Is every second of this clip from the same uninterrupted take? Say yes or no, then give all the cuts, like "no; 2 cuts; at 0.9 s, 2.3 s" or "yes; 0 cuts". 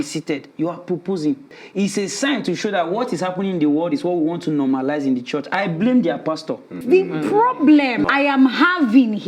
no; 3 cuts; at 1.6 s, 6.8 s, 8.1 s